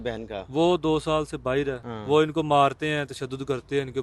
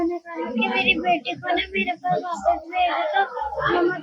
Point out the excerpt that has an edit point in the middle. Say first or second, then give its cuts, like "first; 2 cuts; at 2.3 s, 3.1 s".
first; 1 cut; at 1.9 s